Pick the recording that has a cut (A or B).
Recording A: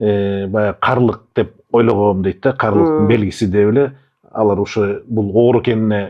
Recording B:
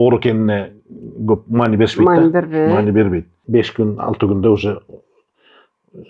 B